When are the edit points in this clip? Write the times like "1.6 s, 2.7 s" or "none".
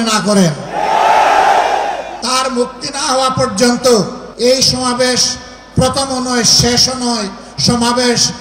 2.1 s, 4.2 s